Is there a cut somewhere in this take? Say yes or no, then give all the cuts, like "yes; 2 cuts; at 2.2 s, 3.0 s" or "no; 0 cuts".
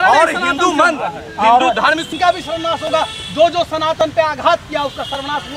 yes; 1 cut; at 2.1 s